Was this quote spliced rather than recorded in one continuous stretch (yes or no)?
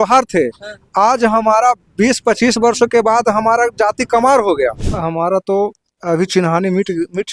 yes